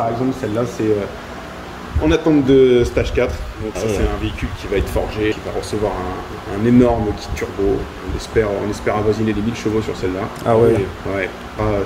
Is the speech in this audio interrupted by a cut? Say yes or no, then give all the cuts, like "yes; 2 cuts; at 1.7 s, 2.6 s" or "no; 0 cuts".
no; 0 cuts